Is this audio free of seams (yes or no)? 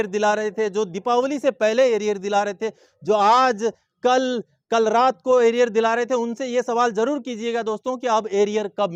yes